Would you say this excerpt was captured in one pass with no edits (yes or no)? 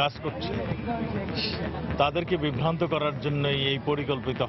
yes